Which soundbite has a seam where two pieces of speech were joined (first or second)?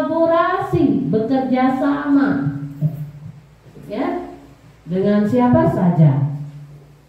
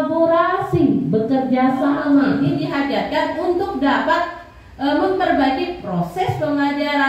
second